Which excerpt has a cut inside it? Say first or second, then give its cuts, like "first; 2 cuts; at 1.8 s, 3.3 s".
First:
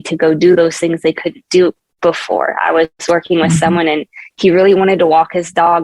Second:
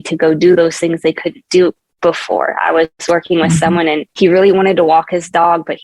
second; 1 cut; at 4.1 s